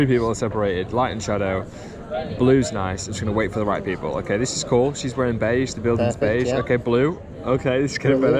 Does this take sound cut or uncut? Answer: uncut